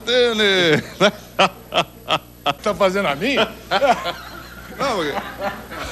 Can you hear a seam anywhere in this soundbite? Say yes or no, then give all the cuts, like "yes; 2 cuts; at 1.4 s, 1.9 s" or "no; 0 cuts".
yes; 1 cut; at 2.6 s